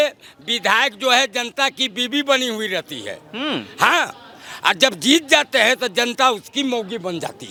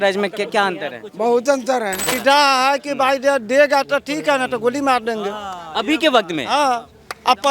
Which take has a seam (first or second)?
second